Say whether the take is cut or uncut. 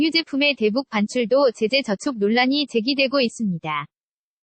uncut